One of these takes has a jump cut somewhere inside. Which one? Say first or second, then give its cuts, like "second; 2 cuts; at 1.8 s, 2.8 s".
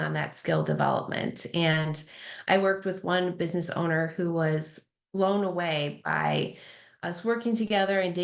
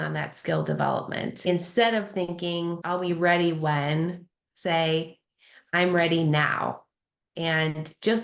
second; 2 cuts; at 1.5 s, 2.8 s